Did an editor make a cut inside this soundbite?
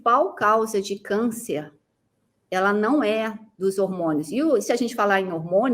no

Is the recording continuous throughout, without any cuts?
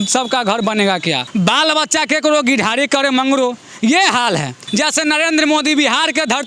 no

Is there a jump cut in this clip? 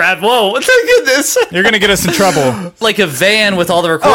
yes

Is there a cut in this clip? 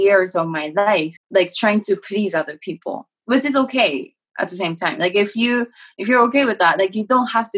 yes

